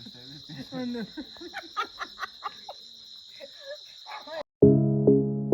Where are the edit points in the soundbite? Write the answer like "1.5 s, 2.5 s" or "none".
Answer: 4.4 s